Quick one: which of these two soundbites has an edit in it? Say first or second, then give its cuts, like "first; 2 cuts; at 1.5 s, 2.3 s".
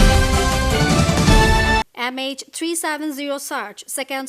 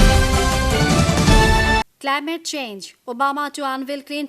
second; 1 cut; at 1.7 s